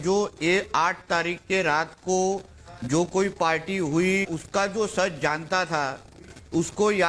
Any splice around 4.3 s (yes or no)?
yes